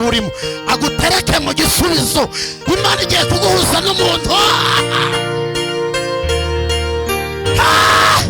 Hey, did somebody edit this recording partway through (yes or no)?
no